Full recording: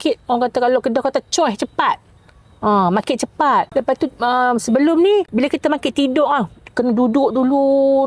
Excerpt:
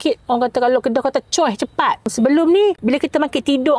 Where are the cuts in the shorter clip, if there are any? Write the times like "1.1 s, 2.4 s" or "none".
2.1 s